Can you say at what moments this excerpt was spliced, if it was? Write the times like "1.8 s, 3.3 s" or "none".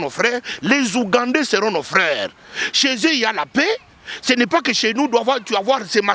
none